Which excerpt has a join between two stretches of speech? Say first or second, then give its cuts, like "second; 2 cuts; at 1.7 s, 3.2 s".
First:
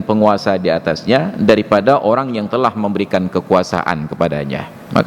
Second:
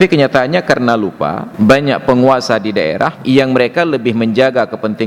second; 2 cuts; at 1.4 s, 3.2 s